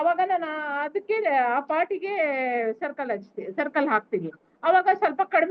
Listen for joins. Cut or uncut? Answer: uncut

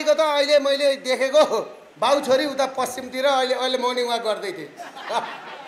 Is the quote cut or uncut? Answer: cut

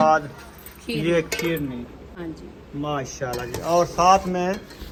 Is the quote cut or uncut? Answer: uncut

